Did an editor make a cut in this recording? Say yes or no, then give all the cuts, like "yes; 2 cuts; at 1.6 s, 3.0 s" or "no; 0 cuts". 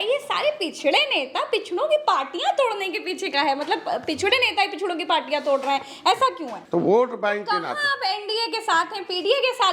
yes; 1 cut; at 6.6 s